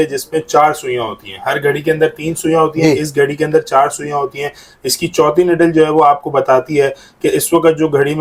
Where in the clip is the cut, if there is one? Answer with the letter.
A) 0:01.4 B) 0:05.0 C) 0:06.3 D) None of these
D